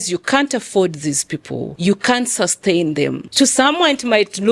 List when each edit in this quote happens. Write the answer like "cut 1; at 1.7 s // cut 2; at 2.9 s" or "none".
cut 1; at 1.6 s // cut 2; at 3.2 s